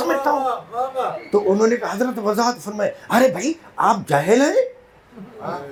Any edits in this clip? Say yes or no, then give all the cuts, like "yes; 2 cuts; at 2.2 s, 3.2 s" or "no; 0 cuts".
no; 0 cuts